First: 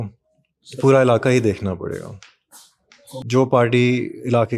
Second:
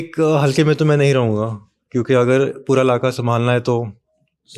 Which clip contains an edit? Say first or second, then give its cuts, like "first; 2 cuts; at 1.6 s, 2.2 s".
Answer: first; 1 cut; at 3.2 s